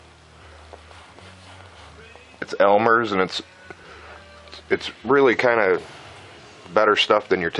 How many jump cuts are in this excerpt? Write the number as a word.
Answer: one